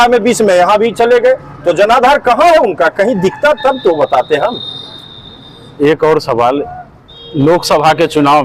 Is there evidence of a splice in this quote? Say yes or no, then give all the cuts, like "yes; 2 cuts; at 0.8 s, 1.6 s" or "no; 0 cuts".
no; 0 cuts